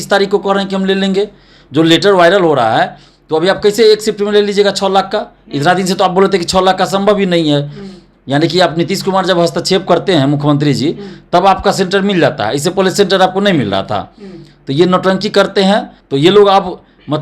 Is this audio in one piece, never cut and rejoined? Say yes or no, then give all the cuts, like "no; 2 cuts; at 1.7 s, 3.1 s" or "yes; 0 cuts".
no; 1 cut; at 16.0 s